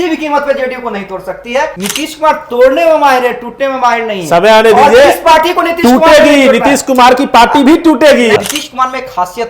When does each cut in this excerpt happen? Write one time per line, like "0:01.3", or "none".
0:01.8
0:08.4